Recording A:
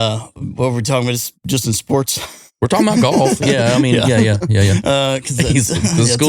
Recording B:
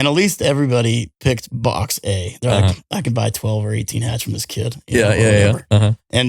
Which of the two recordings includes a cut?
B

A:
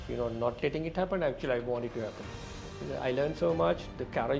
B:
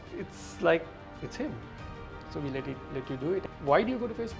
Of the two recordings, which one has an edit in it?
B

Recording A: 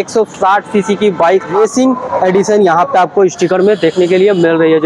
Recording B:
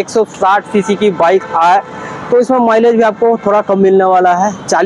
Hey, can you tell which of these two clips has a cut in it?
A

